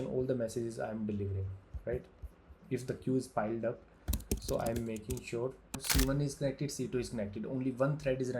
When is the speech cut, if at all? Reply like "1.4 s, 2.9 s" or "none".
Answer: 5.8 s